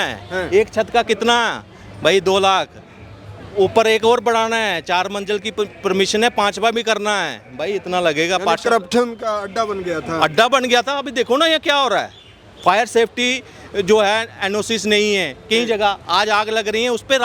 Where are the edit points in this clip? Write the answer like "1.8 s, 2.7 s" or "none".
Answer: none